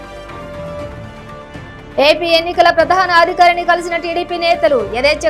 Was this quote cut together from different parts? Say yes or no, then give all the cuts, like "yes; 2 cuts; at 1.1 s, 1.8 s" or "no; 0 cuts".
no; 0 cuts